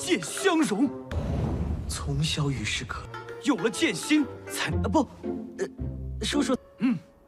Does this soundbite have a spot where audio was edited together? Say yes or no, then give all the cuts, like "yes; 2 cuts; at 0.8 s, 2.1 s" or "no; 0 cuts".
no; 0 cuts